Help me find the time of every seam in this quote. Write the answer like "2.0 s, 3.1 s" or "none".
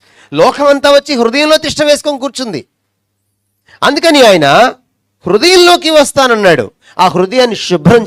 none